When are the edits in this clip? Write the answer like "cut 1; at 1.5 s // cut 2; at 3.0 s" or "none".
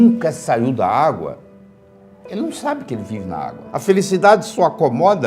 cut 1; at 3.6 s